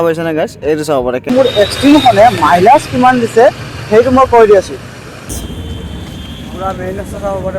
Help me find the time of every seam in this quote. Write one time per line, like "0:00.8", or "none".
0:01.3
0:05.3